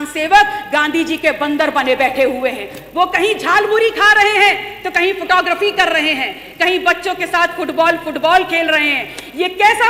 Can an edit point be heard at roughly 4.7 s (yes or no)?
no